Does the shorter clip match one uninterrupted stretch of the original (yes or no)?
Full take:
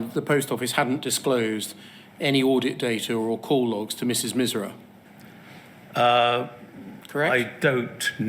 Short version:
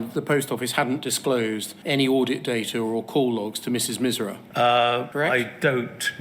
no